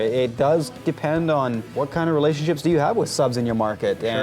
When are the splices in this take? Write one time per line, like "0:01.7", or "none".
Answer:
0:01.7